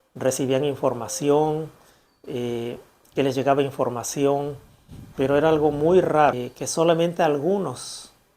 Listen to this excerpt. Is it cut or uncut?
cut